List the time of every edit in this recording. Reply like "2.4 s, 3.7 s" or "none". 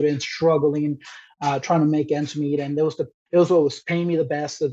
3.1 s